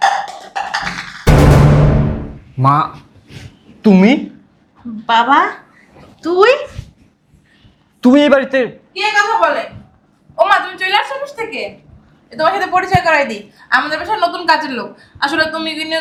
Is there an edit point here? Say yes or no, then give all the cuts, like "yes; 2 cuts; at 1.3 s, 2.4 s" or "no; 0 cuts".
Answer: no; 0 cuts